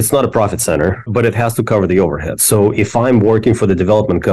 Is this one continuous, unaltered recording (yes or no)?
no